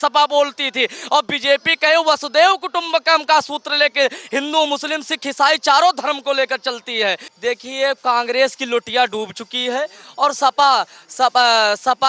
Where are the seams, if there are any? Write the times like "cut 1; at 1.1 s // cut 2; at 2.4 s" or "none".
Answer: cut 1; at 7.3 s